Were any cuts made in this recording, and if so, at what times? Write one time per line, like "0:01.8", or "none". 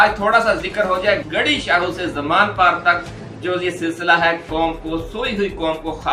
none